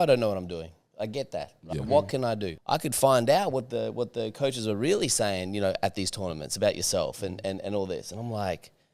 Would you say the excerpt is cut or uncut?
cut